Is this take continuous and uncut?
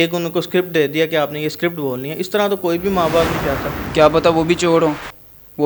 no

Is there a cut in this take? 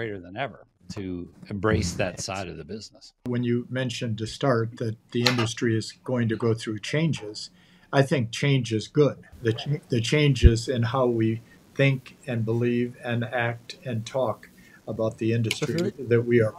yes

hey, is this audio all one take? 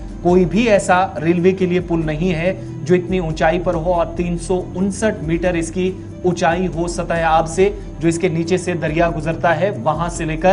yes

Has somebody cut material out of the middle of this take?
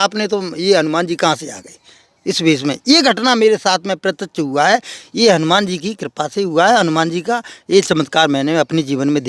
no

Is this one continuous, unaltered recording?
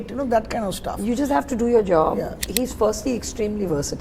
no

